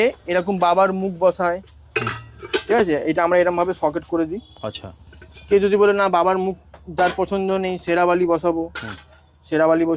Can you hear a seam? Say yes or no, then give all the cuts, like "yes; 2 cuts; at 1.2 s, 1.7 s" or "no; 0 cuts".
no; 0 cuts